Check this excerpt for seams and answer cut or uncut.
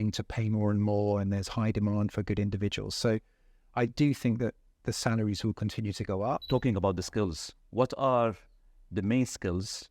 cut